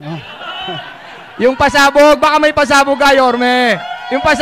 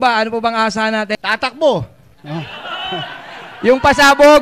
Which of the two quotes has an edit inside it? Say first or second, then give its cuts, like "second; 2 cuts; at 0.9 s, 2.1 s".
second; 1 cut; at 1.2 s